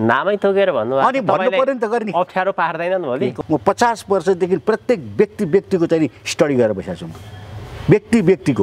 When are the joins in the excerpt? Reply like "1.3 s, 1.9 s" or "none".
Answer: 3.3 s